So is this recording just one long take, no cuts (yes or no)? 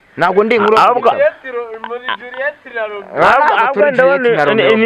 yes